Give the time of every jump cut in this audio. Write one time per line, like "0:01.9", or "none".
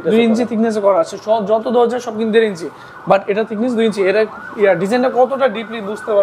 none